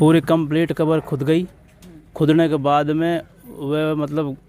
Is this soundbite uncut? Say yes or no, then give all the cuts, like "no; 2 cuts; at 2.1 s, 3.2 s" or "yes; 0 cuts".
yes; 0 cuts